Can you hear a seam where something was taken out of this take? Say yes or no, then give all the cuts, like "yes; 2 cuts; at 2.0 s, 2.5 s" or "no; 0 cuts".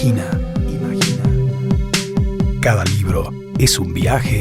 no; 0 cuts